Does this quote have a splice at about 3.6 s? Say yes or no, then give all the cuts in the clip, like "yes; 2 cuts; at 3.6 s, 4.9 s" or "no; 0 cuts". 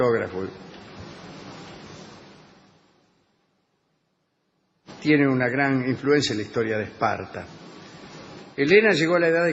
no; 1 cut; at 7.1 s